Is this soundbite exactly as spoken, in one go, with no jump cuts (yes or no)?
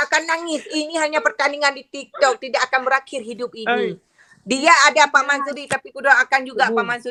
yes